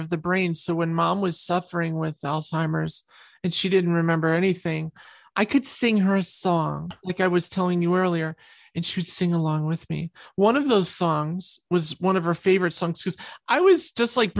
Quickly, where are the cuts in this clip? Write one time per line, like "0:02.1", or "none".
0:07.0